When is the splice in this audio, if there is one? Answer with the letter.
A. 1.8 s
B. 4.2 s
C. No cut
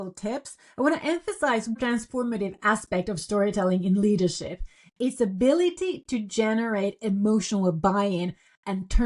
A